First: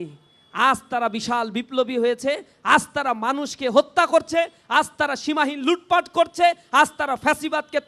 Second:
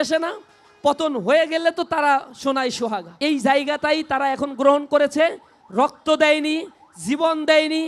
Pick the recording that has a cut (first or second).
second